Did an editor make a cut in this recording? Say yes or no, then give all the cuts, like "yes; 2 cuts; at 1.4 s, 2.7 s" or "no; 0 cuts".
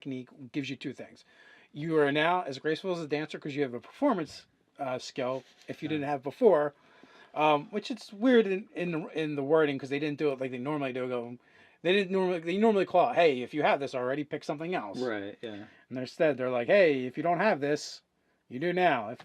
yes; 1 cut; at 16.7 s